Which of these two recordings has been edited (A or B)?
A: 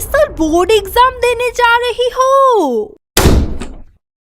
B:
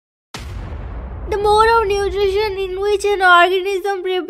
A